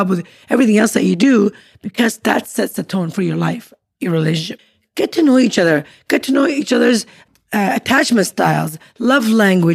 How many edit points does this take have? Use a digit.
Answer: 1